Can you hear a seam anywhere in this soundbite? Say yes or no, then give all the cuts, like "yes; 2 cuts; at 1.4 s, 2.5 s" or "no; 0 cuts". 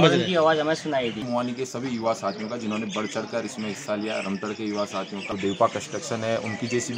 yes; 2 cuts; at 1.2 s, 5.3 s